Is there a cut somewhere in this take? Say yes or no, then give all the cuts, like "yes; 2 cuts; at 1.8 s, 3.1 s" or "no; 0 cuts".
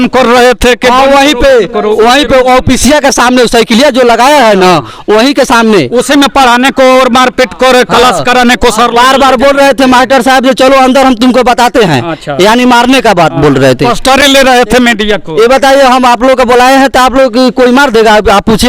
no; 0 cuts